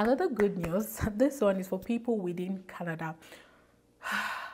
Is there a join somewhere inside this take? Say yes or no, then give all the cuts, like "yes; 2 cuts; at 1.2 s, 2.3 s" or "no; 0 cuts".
no; 0 cuts